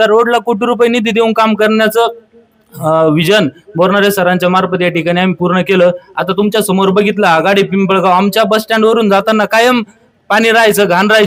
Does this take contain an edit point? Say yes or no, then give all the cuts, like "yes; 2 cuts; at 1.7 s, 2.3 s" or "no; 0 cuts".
no; 0 cuts